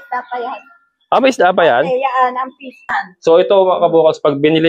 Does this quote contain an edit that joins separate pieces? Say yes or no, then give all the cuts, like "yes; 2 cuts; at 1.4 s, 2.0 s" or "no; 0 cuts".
yes; 1 cut; at 2.9 s